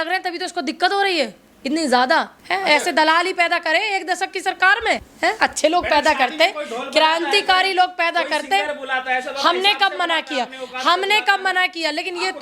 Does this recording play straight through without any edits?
no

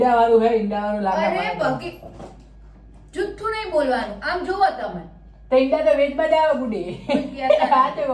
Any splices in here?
no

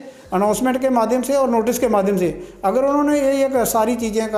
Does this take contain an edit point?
no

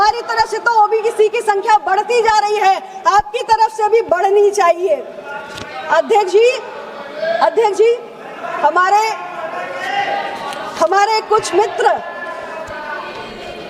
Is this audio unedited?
yes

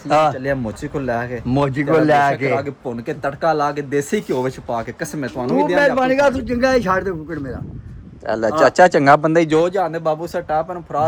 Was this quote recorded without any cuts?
yes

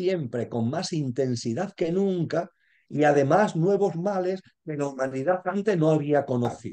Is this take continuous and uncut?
yes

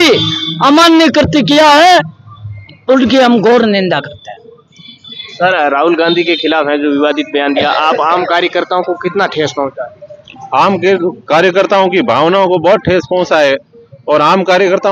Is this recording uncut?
yes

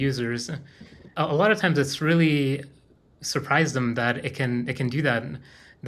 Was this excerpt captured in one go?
no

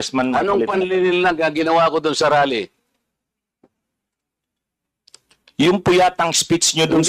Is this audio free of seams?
yes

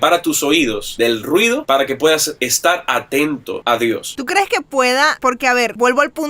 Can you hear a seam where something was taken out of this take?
yes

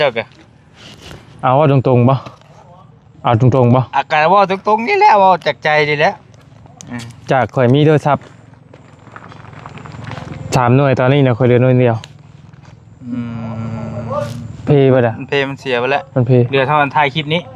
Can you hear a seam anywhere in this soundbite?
no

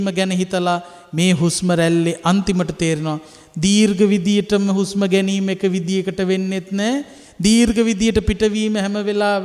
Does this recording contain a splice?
no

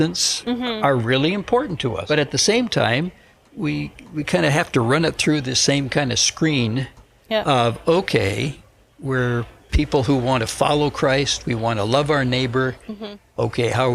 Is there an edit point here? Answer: yes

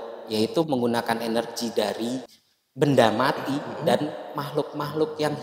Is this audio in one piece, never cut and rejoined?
yes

